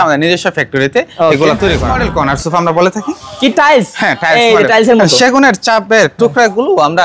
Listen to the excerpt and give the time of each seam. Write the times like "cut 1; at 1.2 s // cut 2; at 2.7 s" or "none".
cut 1; at 2.0 s